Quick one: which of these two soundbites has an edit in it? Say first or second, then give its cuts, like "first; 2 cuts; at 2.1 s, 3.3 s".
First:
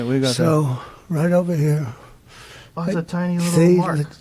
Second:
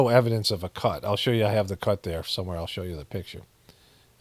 first; 1 cut; at 3.3 s